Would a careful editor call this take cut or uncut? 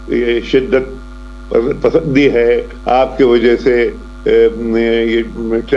uncut